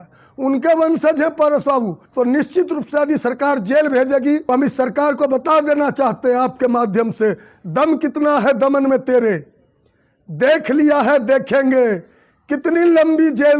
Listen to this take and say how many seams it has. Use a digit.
2